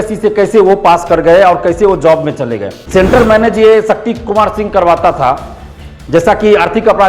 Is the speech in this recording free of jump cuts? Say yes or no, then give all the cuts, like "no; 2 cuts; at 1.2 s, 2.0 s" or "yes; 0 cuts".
no; 1 cut; at 2.8 s